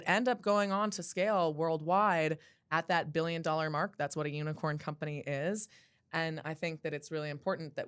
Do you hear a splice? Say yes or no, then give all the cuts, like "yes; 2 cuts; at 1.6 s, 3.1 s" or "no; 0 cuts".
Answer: no; 0 cuts